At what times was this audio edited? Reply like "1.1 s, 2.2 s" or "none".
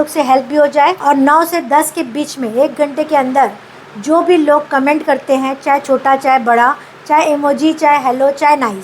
1.0 s